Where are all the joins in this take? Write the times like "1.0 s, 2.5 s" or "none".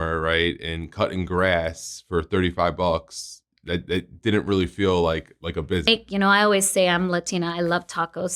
5.9 s